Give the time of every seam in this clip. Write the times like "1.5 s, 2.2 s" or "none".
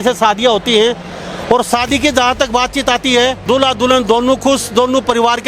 3.4 s